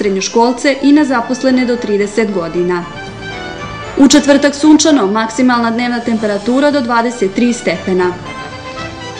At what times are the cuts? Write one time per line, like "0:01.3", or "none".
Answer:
0:08.2